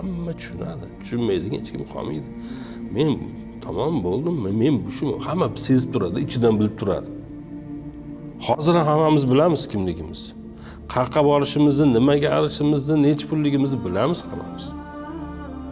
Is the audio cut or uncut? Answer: cut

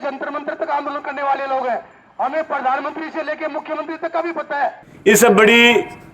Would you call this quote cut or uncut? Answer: cut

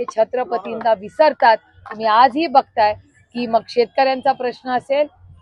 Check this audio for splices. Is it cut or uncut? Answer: uncut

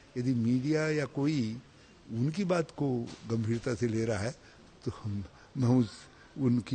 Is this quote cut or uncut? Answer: uncut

